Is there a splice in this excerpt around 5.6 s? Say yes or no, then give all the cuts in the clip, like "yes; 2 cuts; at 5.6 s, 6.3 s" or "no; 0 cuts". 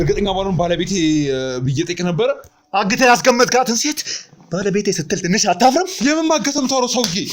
no; 0 cuts